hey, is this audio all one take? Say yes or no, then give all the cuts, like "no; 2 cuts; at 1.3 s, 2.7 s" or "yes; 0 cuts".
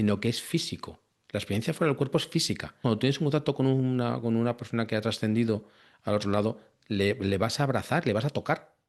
no; 1 cut; at 2.8 s